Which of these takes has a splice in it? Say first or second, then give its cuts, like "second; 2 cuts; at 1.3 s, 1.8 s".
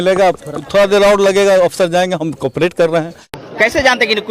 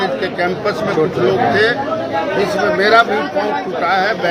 first; 1 cut; at 3.3 s